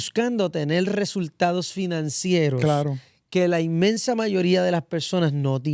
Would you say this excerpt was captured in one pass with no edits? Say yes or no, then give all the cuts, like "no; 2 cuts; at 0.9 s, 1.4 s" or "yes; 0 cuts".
yes; 0 cuts